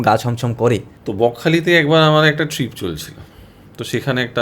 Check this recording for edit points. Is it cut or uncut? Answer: cut